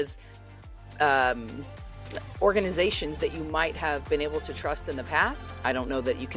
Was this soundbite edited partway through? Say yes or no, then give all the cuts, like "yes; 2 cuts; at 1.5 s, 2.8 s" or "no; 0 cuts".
yes; 1 cut; at 5.5 s